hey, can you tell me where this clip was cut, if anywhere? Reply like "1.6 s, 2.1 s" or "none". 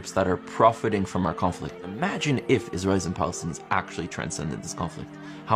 1.8 s